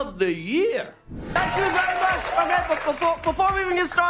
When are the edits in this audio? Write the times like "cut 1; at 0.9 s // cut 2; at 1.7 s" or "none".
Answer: cut 1; at 1.4 s